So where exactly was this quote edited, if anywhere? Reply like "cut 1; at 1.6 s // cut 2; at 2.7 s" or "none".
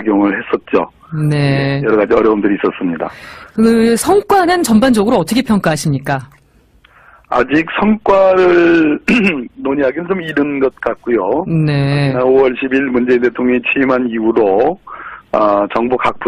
cut 1; at 9.0 s